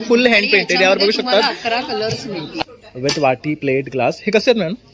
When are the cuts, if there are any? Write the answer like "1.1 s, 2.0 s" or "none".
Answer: 2.6 s